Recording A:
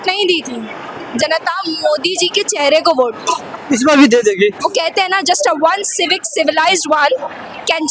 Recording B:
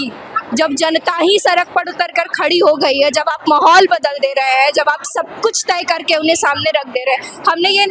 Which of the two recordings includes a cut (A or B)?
A